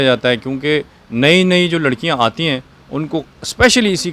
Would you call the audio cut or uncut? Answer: uncut